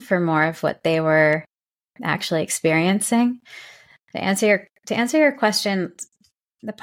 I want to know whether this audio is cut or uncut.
uncut